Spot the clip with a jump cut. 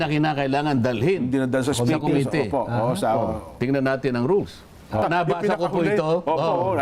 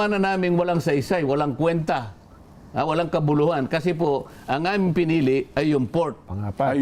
first; 1 cut; at 5.0 s

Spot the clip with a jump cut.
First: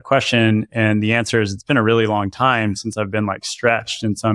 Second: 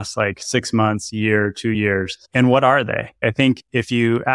second; 2 cuts; at 1.8 s, 3.2 s

